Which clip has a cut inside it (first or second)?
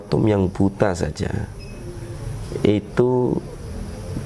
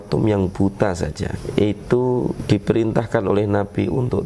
second